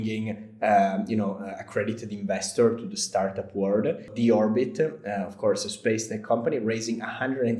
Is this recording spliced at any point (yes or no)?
yes